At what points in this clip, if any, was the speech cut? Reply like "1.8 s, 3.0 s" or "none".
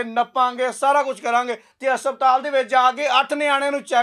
1.7 s